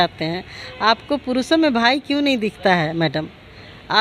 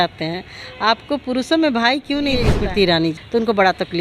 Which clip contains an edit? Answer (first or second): second